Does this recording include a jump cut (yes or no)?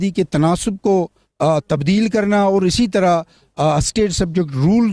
no